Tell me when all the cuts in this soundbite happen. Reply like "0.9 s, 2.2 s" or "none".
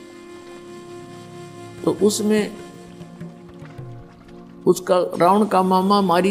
2.5 s, 4.3 s